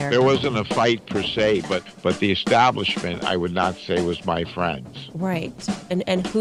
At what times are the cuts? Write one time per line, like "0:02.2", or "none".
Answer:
none

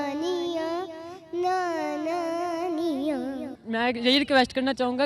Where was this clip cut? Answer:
0:03.6

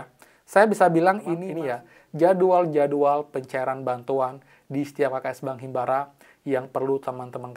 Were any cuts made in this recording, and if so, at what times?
0:01.5

